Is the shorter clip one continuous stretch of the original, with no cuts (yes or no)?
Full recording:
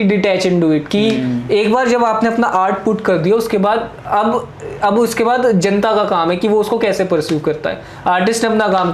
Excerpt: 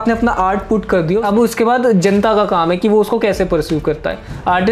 no